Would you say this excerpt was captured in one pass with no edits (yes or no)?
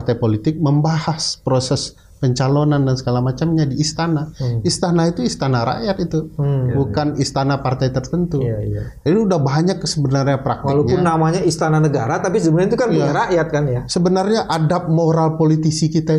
yes